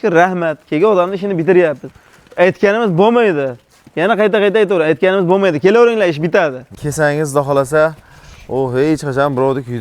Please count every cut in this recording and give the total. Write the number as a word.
one